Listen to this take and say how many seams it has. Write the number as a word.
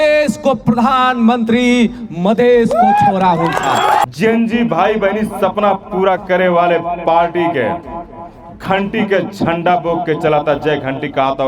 one